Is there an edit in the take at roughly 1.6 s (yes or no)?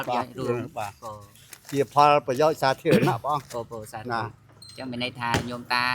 no